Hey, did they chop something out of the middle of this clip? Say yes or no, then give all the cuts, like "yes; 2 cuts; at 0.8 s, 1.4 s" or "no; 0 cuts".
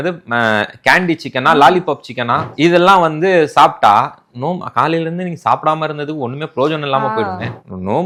no; 0 cuts